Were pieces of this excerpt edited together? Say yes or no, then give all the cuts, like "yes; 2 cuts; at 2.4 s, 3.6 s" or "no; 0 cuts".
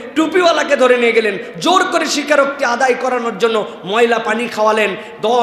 no; 0 cuts